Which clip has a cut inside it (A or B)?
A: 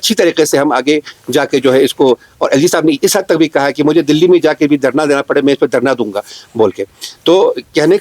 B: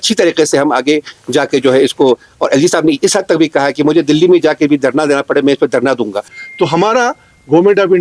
B